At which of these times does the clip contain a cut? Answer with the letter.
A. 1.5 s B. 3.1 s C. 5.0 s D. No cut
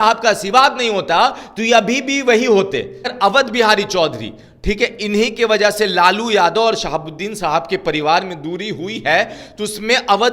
B